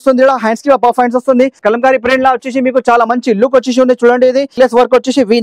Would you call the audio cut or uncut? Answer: cut